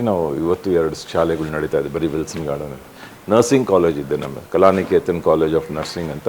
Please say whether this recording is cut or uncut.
uncut